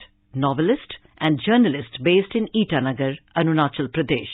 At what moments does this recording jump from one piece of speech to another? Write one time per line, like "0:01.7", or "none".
none